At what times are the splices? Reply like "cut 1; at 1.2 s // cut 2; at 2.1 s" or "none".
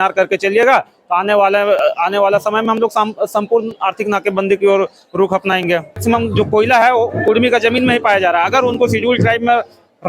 cut 1; at 6.0 s